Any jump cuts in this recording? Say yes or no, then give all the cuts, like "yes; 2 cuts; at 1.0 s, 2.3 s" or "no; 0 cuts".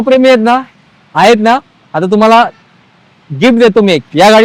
no; 0 cuts